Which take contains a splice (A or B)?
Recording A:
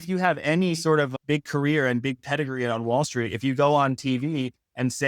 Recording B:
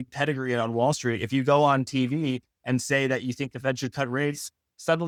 A